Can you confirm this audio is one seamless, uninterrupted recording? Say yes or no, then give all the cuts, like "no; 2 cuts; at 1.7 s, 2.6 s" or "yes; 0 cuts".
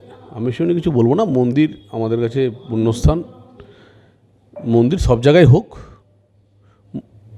yes; 0 cuts